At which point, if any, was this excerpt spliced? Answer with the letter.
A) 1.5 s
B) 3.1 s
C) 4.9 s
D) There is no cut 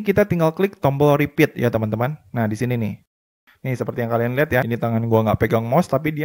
B